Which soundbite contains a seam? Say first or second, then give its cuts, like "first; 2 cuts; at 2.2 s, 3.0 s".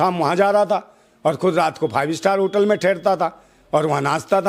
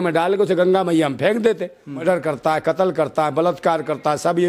second; 1 cut; at 2.0 s